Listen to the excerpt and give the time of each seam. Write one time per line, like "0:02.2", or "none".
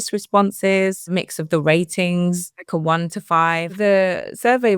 0:01.1
0:02.6
0:03.7